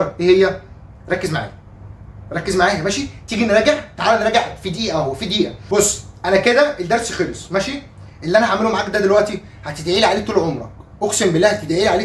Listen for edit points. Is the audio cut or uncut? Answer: cut